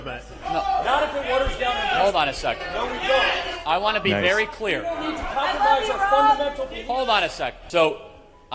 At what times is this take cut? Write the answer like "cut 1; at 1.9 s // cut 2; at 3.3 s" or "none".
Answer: cut 1; at 7.6 s